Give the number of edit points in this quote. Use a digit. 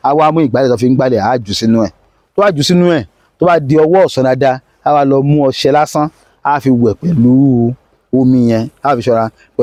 0